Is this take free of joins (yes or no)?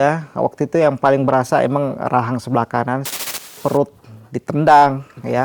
no